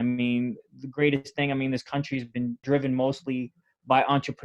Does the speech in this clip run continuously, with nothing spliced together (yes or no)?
no